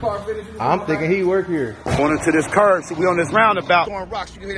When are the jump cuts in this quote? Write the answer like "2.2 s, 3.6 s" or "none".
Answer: 2.0 s, 3.9 s